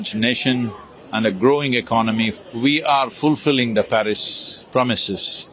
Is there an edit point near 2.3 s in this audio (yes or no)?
yes